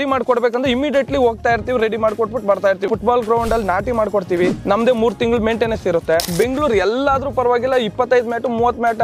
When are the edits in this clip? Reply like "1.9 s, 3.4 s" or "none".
2.9 s, 4.6 s, 6.3 s